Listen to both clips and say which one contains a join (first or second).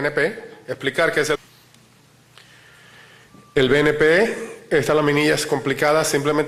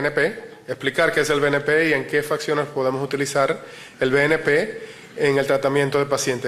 second